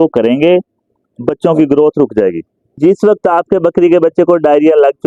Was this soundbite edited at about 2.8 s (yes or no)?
yes